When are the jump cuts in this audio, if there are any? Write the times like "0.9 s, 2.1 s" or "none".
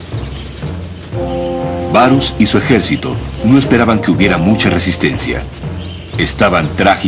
3.6 s